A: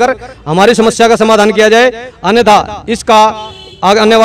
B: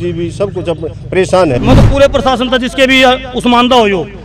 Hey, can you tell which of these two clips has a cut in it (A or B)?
B